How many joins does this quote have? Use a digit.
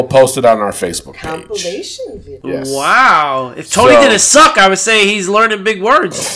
1